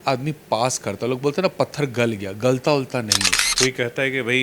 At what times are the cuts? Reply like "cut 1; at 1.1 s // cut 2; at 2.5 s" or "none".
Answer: cut 1; at 3.5 s